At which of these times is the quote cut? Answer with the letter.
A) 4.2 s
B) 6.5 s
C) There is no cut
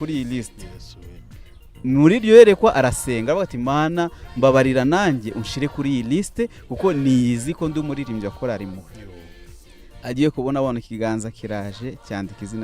C